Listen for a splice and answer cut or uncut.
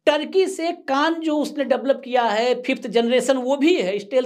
uncut